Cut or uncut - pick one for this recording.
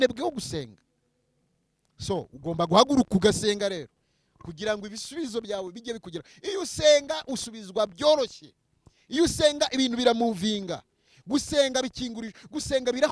uncut